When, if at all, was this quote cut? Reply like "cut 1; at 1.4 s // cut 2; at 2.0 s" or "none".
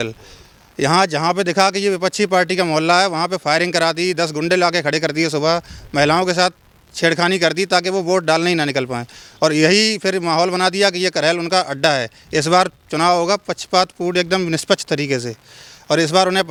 none